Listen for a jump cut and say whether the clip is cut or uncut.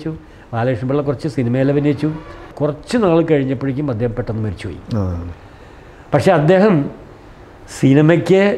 cut